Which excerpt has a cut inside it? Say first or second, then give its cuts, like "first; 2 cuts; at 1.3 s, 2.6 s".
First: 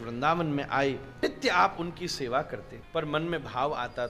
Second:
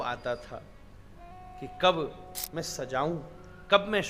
first; 2 cuts; at 1.1 s, 2.7 s